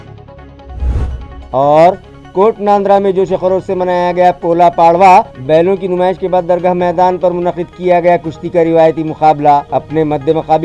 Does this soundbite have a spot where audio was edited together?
no; 0 cuts

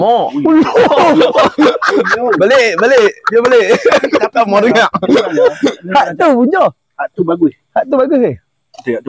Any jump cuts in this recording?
no; 0 cuts

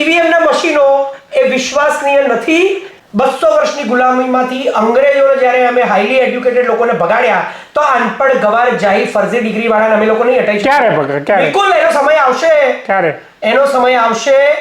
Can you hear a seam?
yes; 1 cut; at 2.9 s

